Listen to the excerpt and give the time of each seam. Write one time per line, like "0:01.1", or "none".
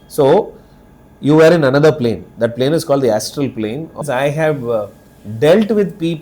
0:04.0